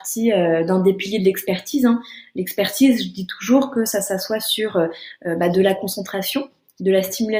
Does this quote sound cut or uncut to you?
uncut